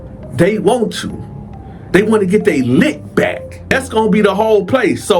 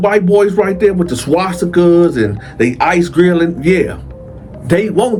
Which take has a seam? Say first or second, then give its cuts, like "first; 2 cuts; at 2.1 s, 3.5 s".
first; 1 cut; at 3.8 s